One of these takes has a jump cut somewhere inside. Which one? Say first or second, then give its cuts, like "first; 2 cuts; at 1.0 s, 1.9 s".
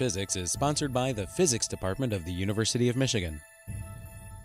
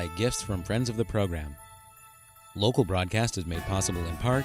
first; 1 cut; at 3.5 s